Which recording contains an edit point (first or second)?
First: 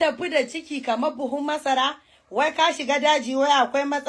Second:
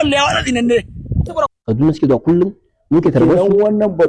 second